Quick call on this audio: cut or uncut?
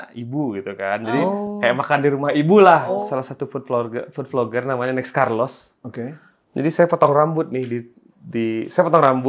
cut